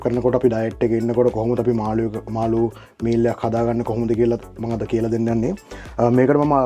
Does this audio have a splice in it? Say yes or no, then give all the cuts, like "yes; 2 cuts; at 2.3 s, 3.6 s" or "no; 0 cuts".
no; 0 cuts